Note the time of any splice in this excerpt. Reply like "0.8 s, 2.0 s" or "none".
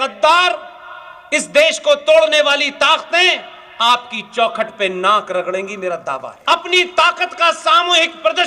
6.3 s